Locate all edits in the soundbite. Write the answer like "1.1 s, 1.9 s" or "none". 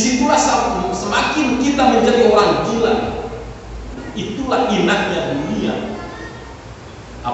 4.0 s